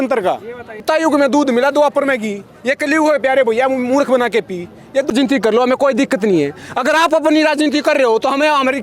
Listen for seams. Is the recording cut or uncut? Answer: cut